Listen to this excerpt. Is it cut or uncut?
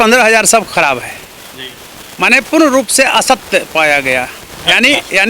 uncut